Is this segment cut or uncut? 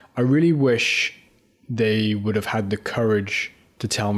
uncut